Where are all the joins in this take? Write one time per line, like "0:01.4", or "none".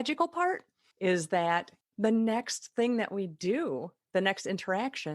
0:01.8